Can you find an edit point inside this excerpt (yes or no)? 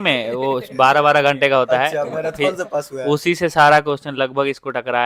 no